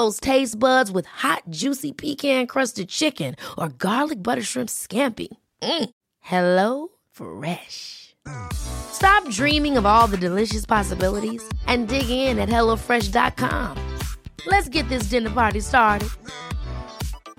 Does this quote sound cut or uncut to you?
uncut